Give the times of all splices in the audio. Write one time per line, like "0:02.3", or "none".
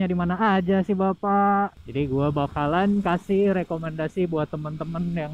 0:01.8